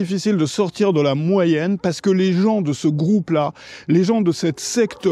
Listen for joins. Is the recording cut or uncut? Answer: uncut